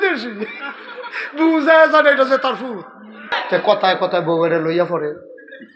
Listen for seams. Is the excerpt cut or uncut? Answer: cut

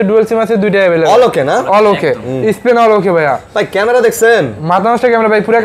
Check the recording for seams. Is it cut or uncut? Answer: uncut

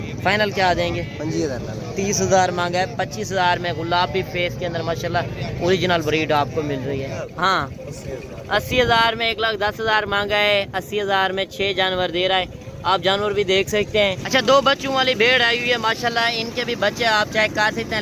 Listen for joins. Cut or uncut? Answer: cut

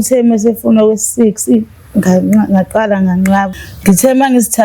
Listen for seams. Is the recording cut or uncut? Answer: cut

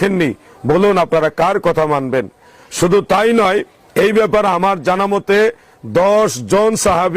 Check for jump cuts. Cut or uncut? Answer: uncut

